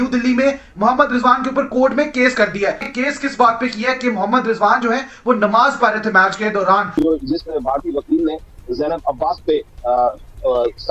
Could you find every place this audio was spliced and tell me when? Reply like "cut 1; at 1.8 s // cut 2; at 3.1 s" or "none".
cut 1; at 2.8 s // cut 2; at 6.9 s